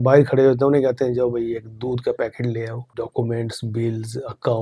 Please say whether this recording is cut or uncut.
cut